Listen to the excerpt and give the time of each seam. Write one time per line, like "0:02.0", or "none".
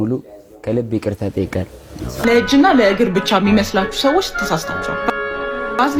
0:02.2